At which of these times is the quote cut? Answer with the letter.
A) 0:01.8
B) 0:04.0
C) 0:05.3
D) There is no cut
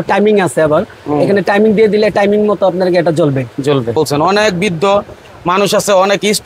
B